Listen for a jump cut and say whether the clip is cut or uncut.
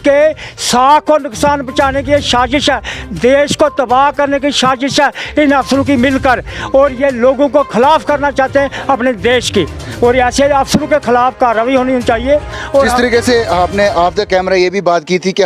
uncut